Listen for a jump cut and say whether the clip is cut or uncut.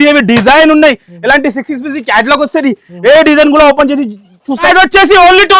cut